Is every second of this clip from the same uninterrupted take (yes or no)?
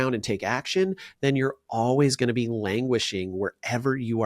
yes